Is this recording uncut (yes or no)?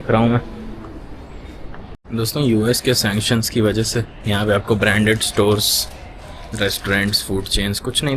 yes